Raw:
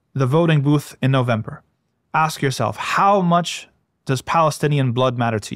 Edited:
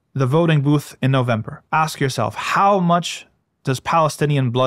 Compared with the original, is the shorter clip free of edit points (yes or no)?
no